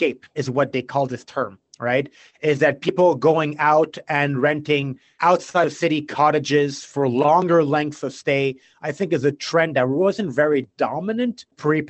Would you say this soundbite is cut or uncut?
uncut